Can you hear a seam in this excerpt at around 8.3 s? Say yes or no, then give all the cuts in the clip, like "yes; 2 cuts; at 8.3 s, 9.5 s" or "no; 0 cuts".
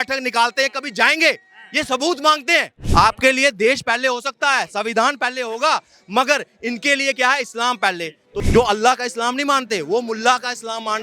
yes; 2 cuts; at 2.8 s, 8.3 s